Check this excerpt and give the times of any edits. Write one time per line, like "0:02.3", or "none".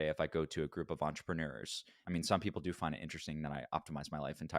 0:02.0